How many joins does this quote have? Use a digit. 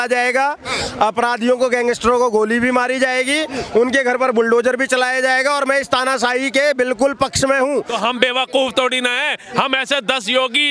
1